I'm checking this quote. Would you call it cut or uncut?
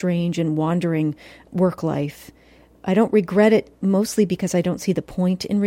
uncut